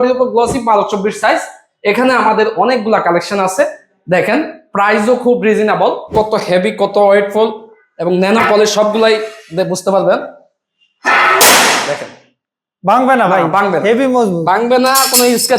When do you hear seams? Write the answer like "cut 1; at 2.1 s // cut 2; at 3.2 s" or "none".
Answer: cut 1; at 6.1 s